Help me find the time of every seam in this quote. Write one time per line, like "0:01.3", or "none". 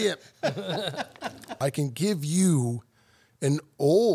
0:01.5